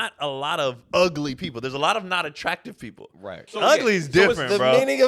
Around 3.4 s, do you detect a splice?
yes; 2 cuts; at 0.8 s, 3.4 s

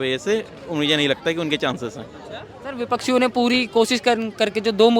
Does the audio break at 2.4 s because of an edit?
no; 0 cuts

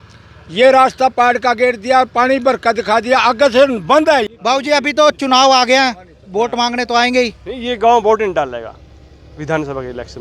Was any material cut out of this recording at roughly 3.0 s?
no; 1 cut; at 4.8 s

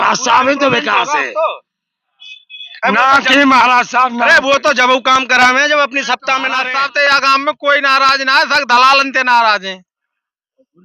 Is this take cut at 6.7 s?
yes; 1 cut; at 6.7 s

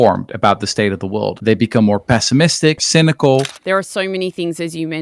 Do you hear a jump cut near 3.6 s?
yes; 3 cuts; at 1.3 s, 2.8 s, 3.6 s

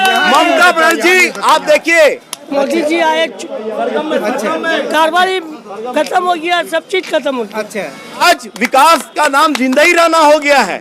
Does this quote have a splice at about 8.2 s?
yes; 2 cuts; at 2.4 s, 8.2 s

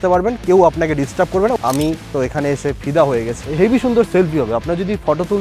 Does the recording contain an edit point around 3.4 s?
yes; 2 cuts; at 1.6 s, 3.4 s

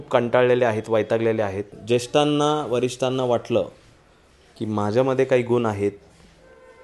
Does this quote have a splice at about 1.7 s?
yes; 1 cut; at 1.7 s

